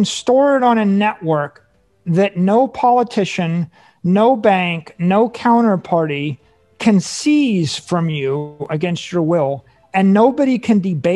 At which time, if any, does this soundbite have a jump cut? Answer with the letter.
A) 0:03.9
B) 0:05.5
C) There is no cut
C